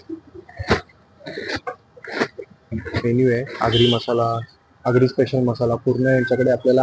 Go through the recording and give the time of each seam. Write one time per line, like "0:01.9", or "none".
0:03.0